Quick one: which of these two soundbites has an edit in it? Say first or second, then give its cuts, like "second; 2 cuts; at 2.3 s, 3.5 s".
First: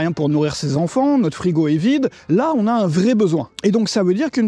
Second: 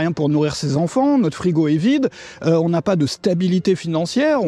first; 2 cuts; at 2.2 s, 3.5 s